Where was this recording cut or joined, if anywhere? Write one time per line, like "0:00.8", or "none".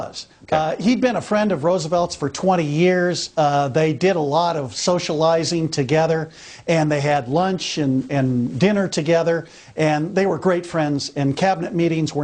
0:07.9